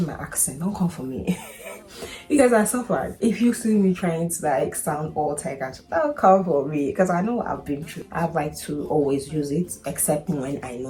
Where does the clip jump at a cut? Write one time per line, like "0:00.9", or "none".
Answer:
none